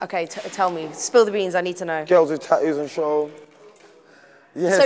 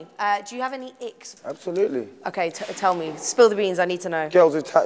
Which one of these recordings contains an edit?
second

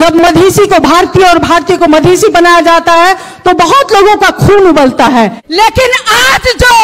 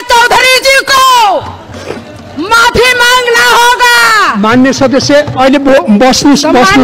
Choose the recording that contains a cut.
first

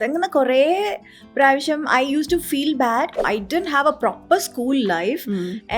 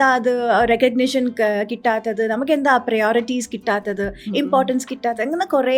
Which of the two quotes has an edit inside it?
first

